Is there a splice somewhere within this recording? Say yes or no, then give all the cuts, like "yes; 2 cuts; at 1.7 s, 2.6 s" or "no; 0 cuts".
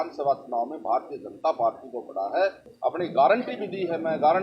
yes; 1 cut; at 2.7 s